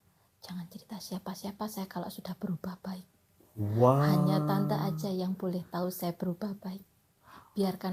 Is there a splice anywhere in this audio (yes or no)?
no